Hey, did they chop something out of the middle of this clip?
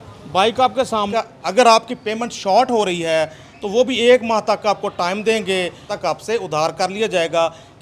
yes; 2 cuts; at 1.1 s, 5.9 s

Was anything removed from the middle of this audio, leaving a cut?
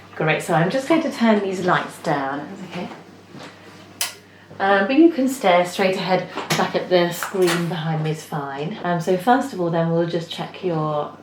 yes; 1 cut; at 8.8 s

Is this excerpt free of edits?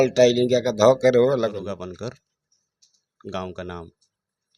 no; 1 cut; at 1.6 s

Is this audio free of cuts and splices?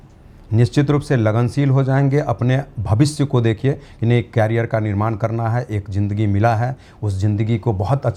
yes; 0 cuts

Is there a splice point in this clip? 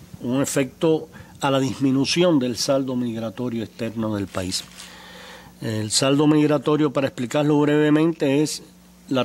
yes; 1 cut; at 3.1 s

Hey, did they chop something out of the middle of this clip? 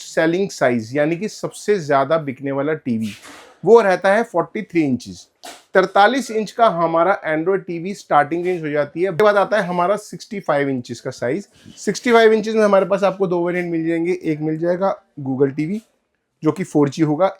yes; 1 cut; at 9.2 s

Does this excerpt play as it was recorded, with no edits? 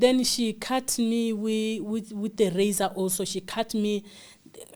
yes; 0 cuts

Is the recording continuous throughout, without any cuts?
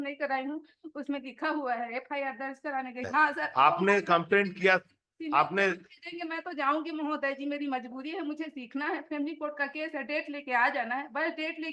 no; 1 cut; at 3.0 s

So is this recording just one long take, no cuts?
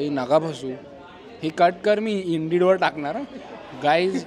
yes; 0 cuts

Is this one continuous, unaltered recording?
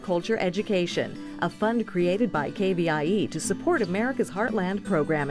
yes; 0 cuts

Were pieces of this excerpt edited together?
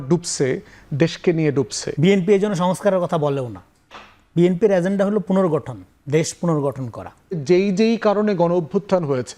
yes; 2 cuts; at 1.8 s, 7.4 s

